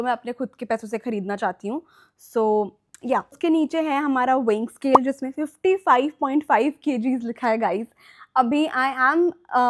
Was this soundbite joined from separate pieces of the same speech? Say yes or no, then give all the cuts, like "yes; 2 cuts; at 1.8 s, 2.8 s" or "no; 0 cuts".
no; 0 cuts